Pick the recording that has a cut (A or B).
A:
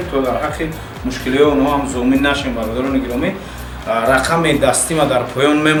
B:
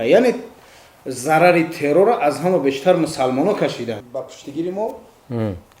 B